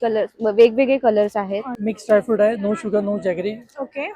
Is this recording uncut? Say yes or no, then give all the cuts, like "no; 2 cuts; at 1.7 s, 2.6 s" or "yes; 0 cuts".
no; 1 cut; at 1.7 s